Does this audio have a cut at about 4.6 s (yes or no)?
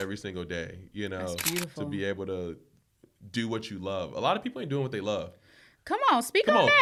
no